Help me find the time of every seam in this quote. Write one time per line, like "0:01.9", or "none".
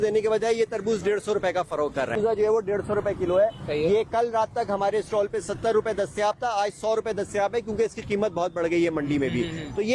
0:02.2